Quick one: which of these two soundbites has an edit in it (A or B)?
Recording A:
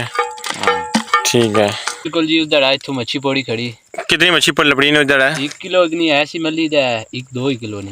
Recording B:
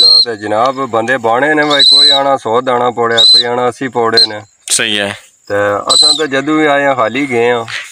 A